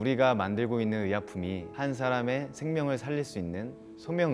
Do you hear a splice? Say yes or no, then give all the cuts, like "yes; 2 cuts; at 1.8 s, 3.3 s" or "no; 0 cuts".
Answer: no; 0 cuts